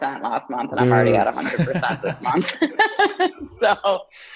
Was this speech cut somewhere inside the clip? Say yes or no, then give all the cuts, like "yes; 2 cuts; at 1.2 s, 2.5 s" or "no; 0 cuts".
no; 0 cuts